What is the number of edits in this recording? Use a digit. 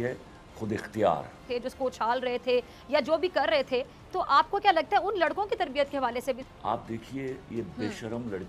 2